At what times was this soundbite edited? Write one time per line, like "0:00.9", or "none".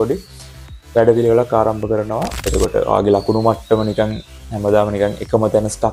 0:02.4